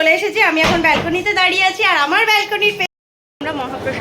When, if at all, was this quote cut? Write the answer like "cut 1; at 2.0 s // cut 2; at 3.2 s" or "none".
cut 1; at 2.9 s